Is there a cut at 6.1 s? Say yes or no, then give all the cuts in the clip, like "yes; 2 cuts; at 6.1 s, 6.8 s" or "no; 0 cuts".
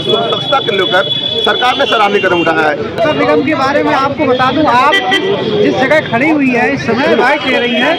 no; 1 cut; at 2.9 s